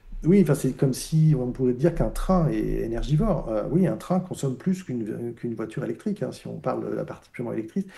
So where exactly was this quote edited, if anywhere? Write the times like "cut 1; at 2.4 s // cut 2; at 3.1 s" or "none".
none